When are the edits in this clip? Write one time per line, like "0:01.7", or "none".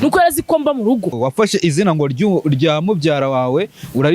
0:01.2